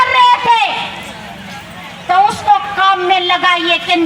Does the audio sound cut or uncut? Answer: uncut